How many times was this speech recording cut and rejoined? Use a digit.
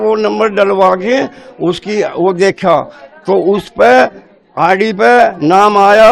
0